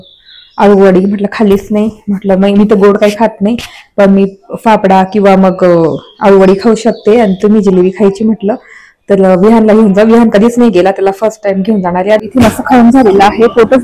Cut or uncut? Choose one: cut